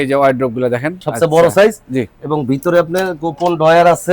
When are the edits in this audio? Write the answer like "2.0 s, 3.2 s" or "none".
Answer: 0.9 s